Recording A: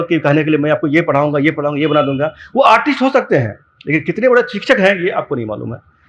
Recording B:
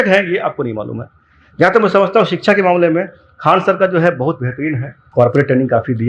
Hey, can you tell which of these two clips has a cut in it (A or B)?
B